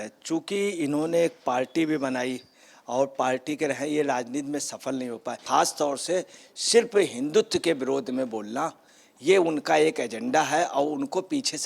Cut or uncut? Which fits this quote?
cut